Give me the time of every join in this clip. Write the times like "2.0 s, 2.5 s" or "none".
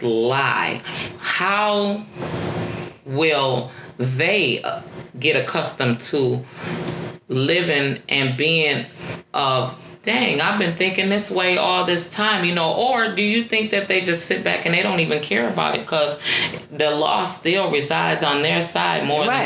none